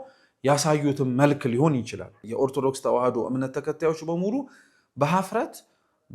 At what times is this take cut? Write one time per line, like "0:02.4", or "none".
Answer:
0:02.2